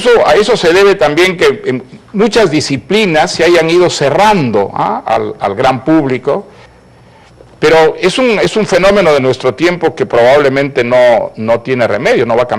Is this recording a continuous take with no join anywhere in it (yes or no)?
no